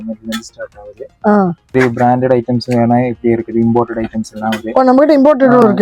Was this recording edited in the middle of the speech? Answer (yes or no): yes